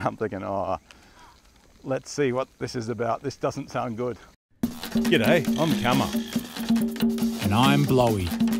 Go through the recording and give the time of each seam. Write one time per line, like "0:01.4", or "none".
0:04.4

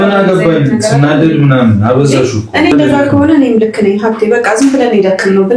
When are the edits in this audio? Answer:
0:02.7

